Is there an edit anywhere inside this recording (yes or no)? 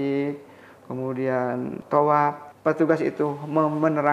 yes